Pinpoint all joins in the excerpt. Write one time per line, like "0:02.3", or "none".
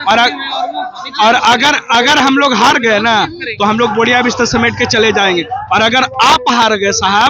none